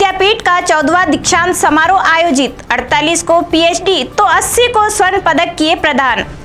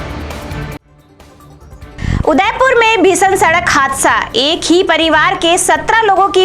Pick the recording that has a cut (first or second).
second